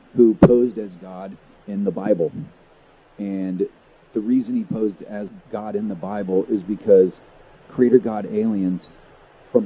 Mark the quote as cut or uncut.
cut